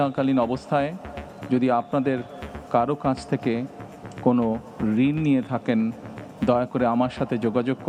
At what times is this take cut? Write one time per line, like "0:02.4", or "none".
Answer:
none